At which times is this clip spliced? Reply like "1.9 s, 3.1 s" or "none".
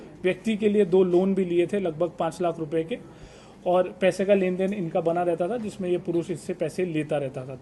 none